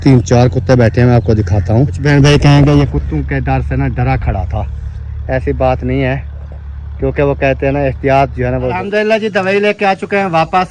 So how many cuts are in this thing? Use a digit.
2